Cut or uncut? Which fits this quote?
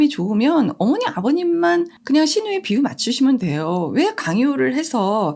cut